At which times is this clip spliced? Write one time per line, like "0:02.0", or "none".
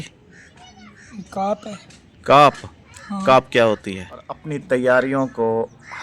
0:04.5